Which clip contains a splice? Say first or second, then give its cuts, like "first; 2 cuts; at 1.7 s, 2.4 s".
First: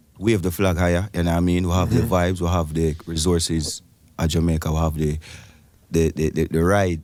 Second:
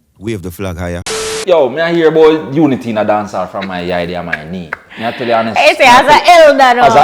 second; 1 cut; at 1.3 s